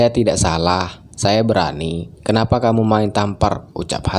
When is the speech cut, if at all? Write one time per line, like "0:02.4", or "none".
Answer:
none